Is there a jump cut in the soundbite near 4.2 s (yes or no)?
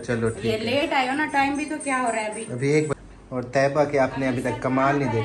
no